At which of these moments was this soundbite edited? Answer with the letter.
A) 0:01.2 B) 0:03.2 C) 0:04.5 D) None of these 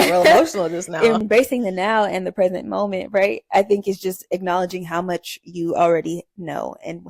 A